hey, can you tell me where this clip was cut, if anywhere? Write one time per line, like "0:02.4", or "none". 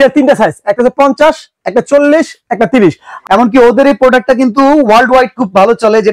0:03.1